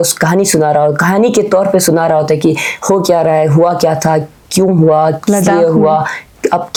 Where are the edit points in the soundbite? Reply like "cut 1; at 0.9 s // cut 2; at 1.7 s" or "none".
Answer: none